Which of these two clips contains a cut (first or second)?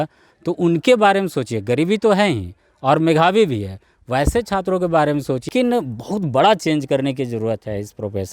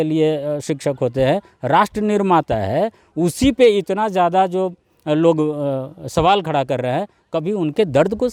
first